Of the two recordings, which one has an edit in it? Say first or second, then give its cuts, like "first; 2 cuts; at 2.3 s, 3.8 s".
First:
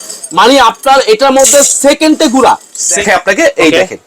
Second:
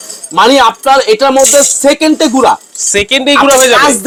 first; 1 cut; at 3.0 s